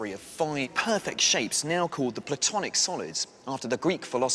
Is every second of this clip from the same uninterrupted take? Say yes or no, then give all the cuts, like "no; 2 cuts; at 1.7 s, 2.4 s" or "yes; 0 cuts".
no; 1 cut; at 3.3 s